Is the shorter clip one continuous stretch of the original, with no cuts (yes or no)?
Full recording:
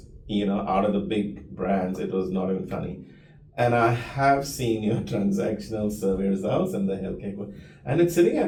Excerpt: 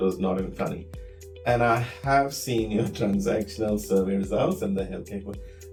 yes